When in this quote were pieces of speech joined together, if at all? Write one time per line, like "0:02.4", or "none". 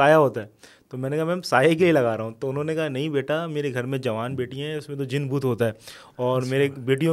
none